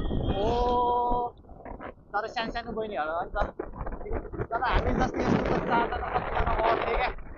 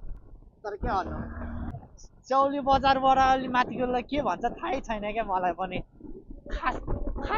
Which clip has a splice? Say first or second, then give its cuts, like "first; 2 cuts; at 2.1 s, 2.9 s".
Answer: second; 1 cut; at 1.7 s